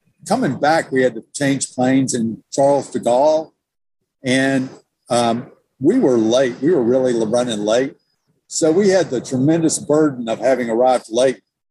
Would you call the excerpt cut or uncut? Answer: uncut